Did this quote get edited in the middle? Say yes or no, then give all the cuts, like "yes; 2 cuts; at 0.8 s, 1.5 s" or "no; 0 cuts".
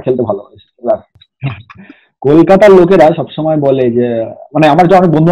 yes; 1 cut; at 1.1 s